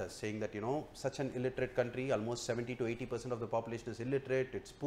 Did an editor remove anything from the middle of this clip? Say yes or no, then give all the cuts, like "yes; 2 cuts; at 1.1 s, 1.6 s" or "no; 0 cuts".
no; 0 cuts